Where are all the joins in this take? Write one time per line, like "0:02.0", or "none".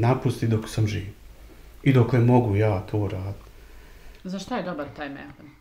0:04.1